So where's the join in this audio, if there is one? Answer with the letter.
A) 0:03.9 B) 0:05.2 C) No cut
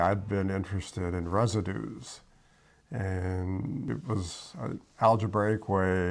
A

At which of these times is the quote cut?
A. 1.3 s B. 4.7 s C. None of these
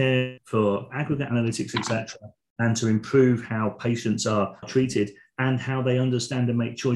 B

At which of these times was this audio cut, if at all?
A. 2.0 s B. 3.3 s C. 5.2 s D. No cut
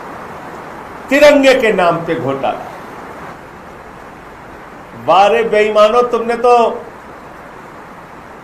B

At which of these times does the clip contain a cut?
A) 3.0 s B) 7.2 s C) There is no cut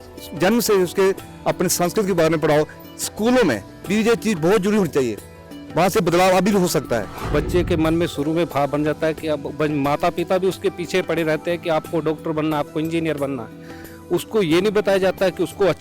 B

